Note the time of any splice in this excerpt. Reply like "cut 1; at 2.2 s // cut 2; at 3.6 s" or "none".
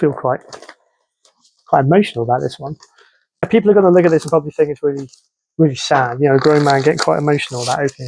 cut 1; at 3.5 s